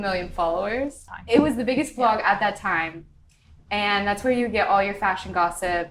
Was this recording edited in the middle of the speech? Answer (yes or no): yes